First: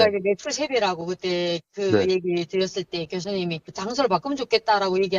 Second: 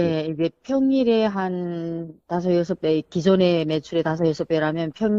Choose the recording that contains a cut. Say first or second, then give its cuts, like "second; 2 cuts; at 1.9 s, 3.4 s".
first; 1 cut; at 3.7 s